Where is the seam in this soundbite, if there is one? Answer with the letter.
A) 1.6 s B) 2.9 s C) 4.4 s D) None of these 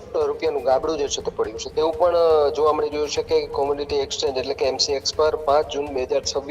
A